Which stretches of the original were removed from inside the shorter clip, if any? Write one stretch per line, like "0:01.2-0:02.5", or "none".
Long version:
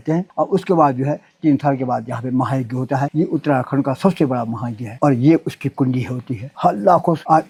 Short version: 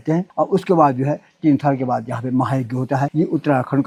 none